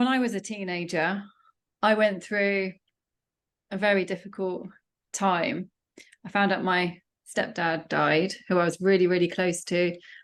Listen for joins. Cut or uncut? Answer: uncut